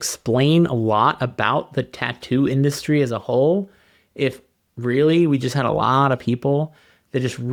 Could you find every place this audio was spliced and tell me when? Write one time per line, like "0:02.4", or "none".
none

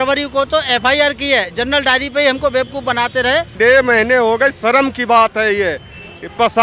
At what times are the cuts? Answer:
0:03.6

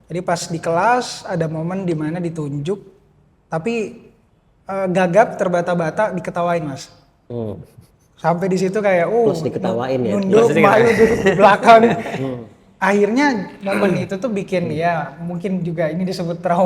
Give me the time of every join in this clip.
none

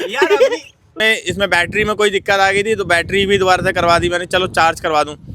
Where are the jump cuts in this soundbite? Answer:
0:01.0

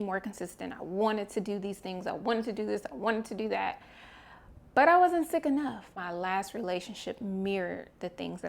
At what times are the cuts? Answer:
0:05.8

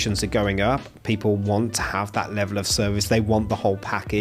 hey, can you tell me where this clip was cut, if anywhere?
none

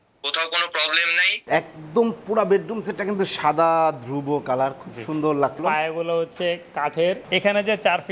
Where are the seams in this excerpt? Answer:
0:01.3
0:05.6
0:07.2

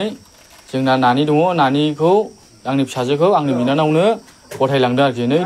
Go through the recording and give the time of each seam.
none

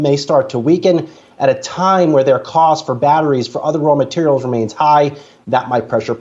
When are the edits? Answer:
0:01.1

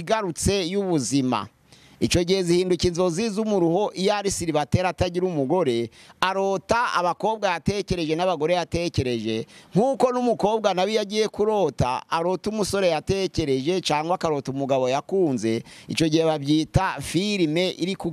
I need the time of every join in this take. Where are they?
none

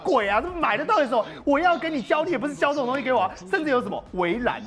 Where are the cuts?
none

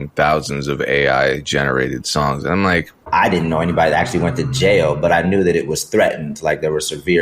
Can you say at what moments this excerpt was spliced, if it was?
0:03.0

